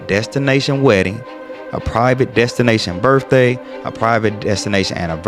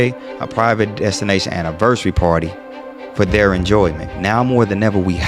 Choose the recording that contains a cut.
second; 1 cut; at 4.0 s

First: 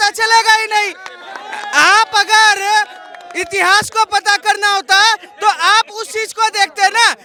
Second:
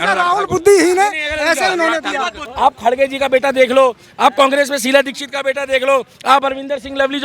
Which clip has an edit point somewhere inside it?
second; 1 cut; at 2.4 s

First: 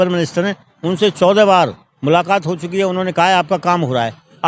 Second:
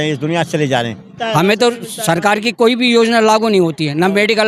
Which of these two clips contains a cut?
second; 1 cut; at 1.2 s

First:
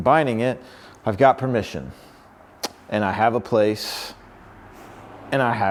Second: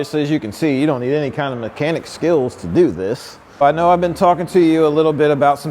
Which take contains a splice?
second; 1 cut; at 3.6 s

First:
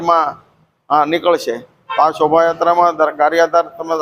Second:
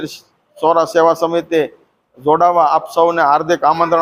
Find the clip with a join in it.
first; 1 cut; at 1.7 s

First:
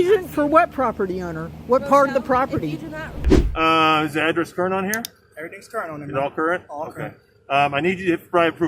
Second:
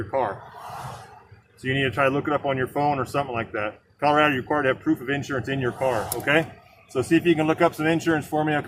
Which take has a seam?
first; 1 cut; at 3.3 s

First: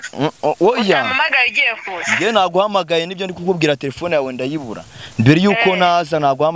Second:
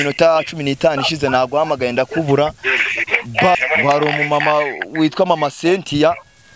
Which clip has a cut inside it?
second; 1 cut; at 3.5 s

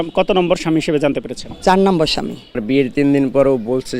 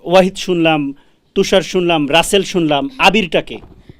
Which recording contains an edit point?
first; 1 cut; at 2.5 s

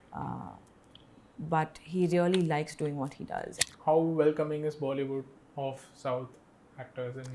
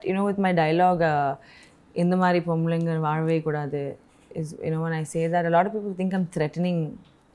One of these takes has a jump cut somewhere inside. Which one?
first; 1 cut; at 3.5 s

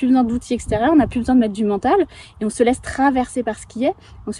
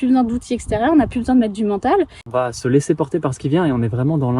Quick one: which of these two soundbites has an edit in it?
second; 1 cut; at 2.2 s

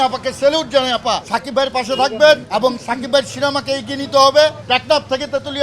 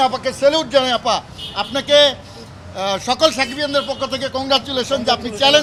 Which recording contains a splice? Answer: first; 3 cuts; at 1.3 s, 2.4 s, 4.6 s

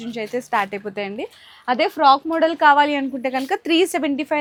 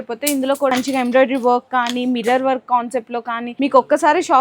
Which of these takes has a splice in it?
second; 2 cuts; at 0.7 s, 3.4 s

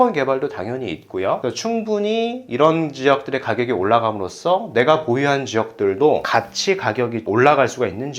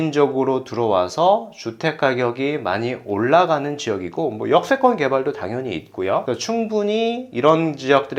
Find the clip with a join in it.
first; 1 cut; at 7.3 s

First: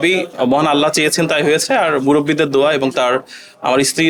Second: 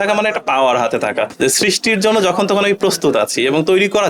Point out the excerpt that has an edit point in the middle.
second; 1 cut; at 1.3 s

